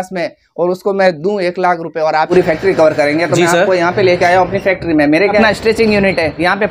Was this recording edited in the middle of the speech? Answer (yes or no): yes